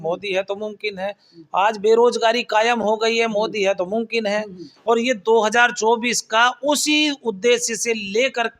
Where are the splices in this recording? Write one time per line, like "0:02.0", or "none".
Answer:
0:04.7